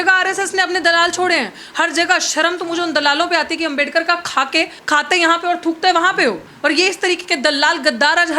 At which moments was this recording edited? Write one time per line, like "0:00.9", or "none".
0:06.5